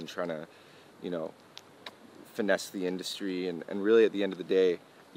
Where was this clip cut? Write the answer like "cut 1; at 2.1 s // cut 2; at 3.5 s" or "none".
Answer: none